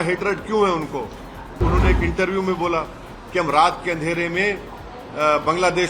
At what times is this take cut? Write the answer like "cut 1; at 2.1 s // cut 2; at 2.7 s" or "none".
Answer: cut 1; at 1.6 s